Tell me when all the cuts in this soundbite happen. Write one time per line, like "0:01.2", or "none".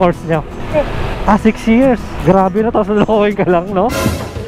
none